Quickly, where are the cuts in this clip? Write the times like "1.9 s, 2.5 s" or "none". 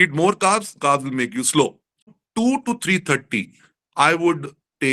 2.2 s